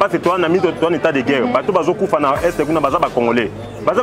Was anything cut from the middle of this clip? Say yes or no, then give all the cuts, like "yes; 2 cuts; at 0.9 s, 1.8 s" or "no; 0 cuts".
no; 0 cuts